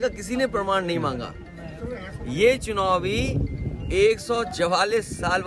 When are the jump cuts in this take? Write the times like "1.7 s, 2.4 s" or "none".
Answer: none